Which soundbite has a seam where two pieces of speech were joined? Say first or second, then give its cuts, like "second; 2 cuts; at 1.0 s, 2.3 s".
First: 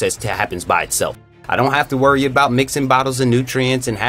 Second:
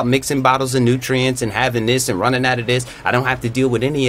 first; 1 cut; at 1.4 s